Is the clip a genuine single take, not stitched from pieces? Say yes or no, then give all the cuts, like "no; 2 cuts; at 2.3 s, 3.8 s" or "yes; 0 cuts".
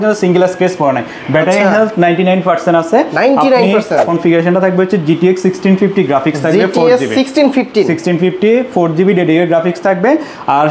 no; 1 cut; at 4.0 s